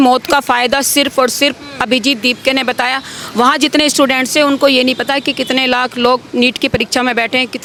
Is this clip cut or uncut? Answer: uncut